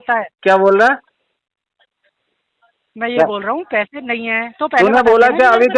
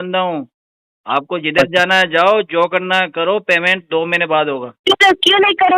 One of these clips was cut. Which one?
second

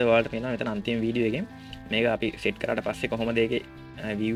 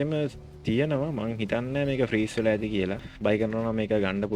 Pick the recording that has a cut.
second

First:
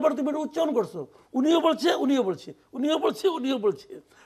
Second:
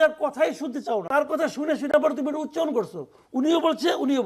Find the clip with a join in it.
second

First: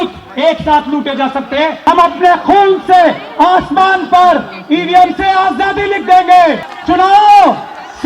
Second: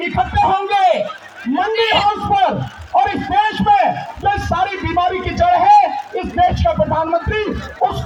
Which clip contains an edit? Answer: first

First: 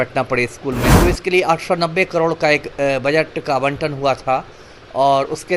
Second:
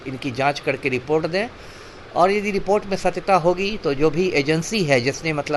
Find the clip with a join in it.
first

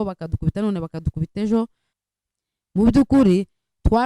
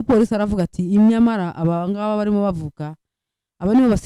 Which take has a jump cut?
first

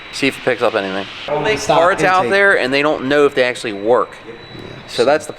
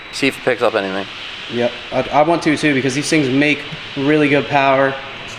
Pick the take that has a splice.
first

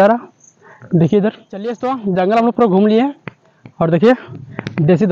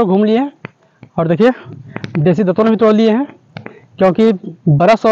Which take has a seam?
first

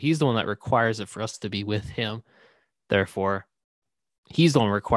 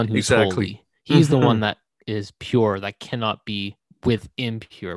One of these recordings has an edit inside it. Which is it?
second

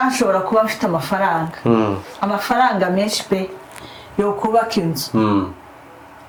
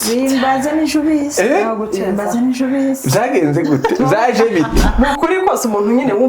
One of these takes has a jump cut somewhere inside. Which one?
second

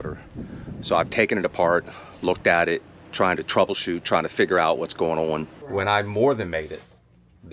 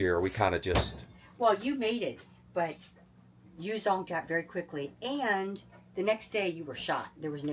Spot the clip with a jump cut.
first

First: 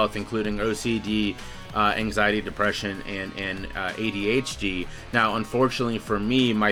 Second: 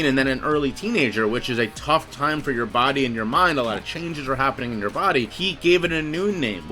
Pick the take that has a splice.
second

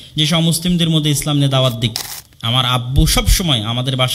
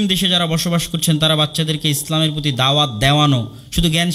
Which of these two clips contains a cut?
first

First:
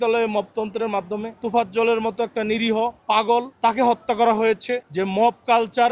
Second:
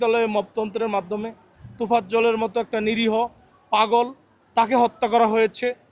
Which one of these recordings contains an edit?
first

